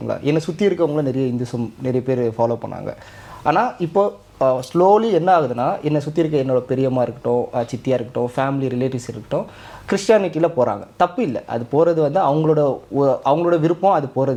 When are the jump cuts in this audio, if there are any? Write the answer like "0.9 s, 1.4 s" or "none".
none